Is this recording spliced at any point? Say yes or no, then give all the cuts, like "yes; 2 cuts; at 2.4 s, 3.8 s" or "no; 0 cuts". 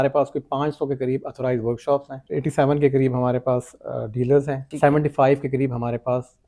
yes; 2 cuts; at 2.2 s, 4.6 s